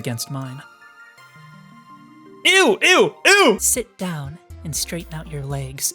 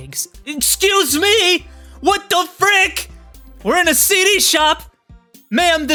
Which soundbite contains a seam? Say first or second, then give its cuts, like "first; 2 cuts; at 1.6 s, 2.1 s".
first; 1 cut; at 3.6 s